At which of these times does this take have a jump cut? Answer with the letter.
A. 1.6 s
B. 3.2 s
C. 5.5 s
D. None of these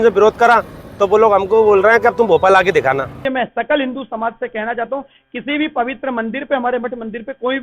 B